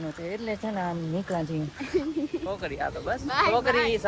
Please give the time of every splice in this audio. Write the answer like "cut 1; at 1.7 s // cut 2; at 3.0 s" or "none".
cut 1; at 2.6 s